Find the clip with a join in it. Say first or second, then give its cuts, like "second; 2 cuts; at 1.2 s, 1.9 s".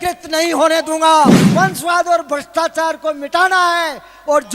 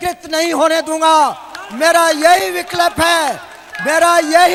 first; 1 cut; at 1.4 s